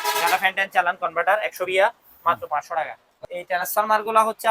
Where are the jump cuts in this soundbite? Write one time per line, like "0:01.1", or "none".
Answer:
0:03.2